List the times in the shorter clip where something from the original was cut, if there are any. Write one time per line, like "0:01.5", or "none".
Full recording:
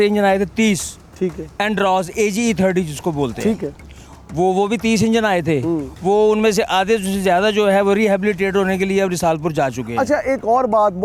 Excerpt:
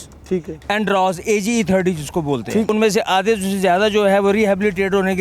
0:02.7